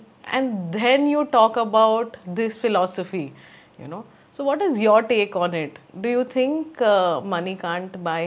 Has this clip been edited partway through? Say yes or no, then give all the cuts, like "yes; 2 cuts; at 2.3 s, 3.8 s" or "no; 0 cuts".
no; 0 cuts